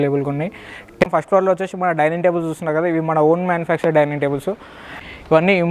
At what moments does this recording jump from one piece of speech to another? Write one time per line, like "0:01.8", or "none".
0:01.0
0:04.8

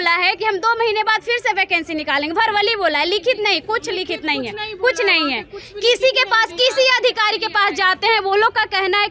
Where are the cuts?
none

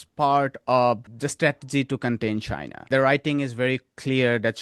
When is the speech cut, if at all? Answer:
0:01.1
0:02.9

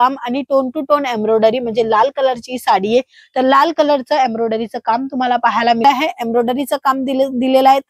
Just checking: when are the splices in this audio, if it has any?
0:05.8

